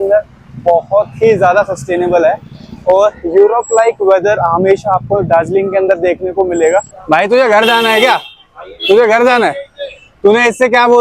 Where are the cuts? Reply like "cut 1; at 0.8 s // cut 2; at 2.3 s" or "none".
cut 1; at 7.0 s